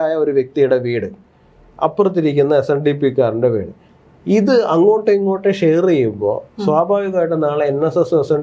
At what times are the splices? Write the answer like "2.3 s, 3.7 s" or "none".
none